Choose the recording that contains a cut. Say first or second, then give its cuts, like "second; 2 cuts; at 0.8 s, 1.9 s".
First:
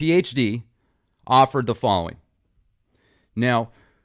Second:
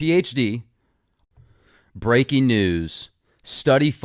first; 1 cut; at 1.2 s